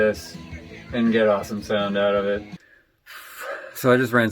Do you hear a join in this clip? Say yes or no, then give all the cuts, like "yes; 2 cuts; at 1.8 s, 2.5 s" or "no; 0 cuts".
yes; 1 cut; at 2.6 s